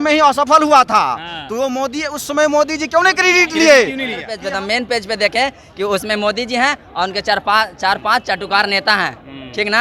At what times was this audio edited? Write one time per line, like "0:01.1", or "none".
0:04.3